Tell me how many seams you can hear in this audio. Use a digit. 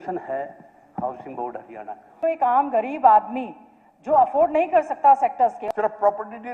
2